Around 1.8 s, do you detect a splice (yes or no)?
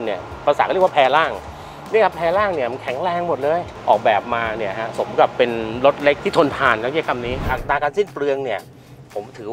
no